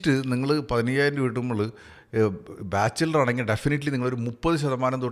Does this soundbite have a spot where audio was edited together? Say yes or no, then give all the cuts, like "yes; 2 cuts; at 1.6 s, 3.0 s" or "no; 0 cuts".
no; 0 cuts